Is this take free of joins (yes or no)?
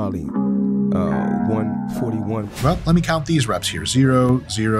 no